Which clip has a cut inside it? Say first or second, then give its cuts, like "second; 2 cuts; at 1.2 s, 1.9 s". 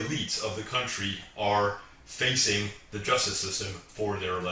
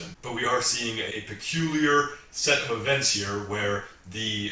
second; 1 cut; at 1.1 s